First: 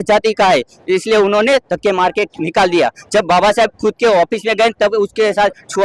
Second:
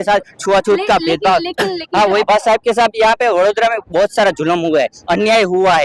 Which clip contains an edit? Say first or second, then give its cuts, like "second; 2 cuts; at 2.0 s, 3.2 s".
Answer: second; 1 cut; at 2.3 s